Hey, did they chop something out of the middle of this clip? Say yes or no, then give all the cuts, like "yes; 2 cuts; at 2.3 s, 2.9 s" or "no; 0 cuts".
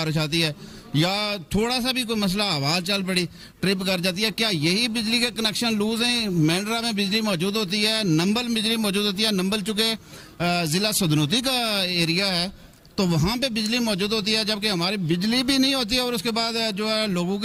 no; 0 cuts